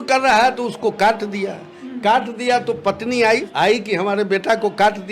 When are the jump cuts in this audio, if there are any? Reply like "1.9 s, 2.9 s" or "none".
3.5 s